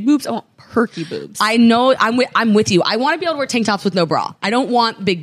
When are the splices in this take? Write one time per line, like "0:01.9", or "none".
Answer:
none